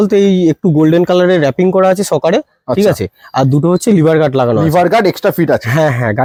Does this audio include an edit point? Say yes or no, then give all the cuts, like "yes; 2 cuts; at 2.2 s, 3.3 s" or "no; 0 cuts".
no; 0 cuts